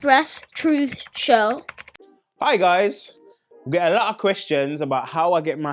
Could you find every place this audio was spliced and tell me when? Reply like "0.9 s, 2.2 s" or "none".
1.8 s